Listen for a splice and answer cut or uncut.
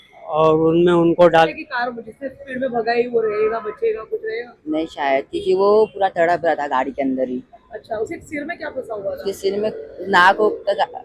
cut